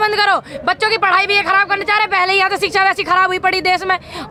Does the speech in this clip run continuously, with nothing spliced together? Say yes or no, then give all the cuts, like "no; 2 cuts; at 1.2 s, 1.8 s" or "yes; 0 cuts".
yes; 0 cuts